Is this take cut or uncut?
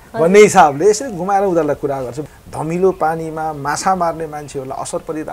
cut